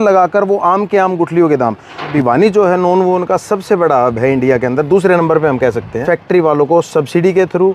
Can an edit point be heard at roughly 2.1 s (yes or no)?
yes